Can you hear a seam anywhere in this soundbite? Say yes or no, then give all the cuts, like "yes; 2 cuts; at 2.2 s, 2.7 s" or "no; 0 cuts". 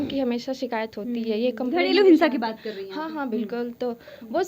no; 0 cuts